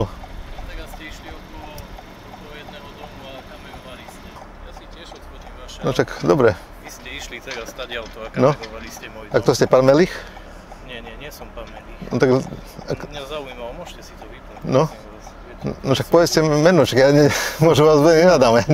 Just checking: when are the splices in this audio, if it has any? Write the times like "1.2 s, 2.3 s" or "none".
4.4 s